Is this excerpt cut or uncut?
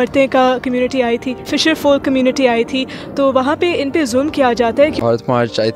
cut